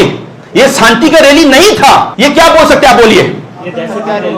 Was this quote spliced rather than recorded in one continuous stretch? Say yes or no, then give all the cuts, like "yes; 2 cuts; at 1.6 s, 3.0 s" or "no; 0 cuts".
yes; 1 cut; at 2.1 s